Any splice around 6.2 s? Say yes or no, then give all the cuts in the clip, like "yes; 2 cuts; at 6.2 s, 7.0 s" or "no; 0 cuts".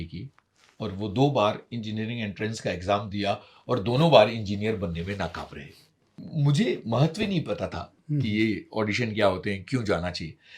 yes; 1 cut; at 6.2 s